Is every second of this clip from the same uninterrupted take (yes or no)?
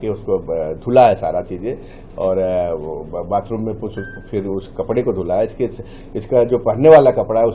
yes